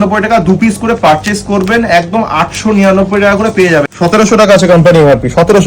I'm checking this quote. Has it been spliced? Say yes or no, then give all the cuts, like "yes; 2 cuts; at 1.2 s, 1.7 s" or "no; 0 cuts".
yes; 1 cut; at 3.9 s